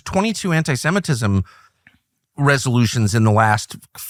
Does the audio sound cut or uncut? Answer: uncut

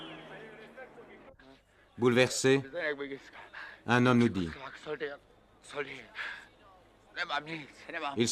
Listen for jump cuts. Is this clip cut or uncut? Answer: uncut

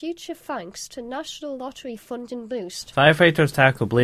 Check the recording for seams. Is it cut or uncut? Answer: cut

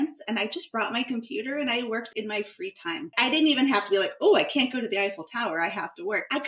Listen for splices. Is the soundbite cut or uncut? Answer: cut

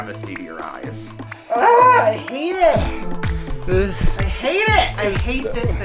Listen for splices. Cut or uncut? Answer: cut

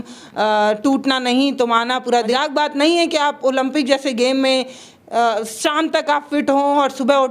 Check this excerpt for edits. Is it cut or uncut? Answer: cut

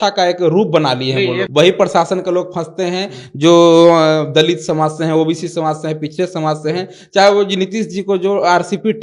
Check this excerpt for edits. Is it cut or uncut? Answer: cut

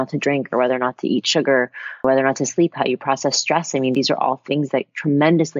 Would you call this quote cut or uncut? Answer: cut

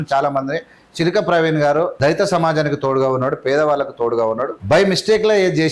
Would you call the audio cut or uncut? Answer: cut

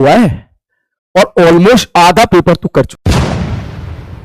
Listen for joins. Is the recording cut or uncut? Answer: cut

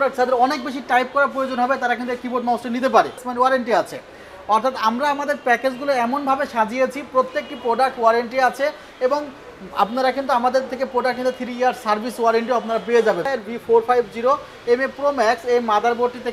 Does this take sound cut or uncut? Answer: cut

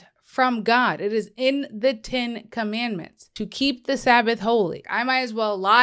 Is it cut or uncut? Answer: cut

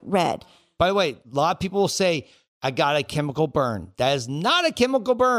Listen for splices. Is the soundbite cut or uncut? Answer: cut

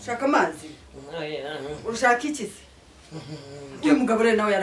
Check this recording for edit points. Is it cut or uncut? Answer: uncut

